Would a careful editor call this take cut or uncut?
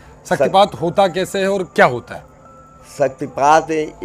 uncut